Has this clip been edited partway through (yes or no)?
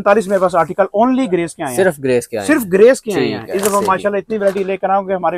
no